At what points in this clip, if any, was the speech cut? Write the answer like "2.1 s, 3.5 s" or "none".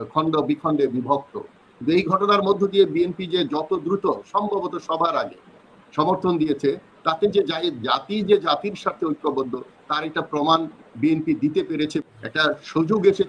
12.0 s